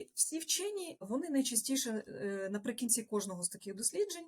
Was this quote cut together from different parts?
yes; 1 cut; at 1.1 s

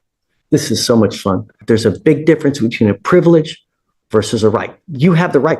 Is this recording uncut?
no; 1 cut; at 1.6 s

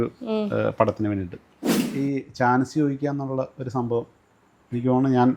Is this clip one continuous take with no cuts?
no; 1 cut; at 1.8 s

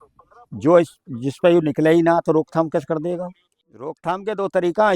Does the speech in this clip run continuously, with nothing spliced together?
no; 1 cut; at 4.0 s

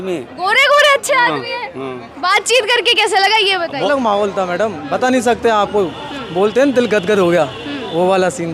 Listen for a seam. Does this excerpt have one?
yes; 1 cut; at 3.9 s

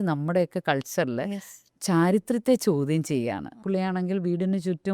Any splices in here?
yes; 1 cut; at 3.5 s

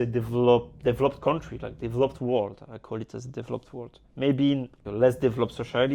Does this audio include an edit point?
yes; 1 cut; at 4.8 s

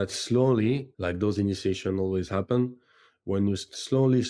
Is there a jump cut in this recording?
yes; 1 cut; at 0.9 s

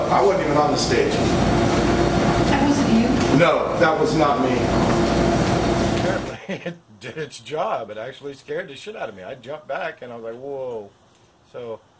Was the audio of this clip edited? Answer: yes; 1 cut; at 6.1 s

